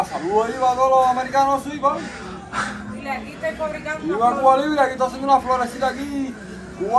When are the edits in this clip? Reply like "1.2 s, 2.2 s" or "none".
none